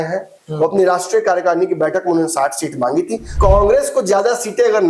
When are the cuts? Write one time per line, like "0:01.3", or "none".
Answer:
0:03.3